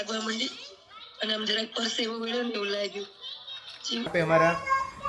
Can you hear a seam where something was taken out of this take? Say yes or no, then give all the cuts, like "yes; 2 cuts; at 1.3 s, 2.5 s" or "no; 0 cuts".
yes; 1 cut; at 4.1 s